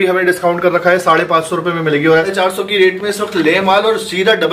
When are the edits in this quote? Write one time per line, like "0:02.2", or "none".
0:02.3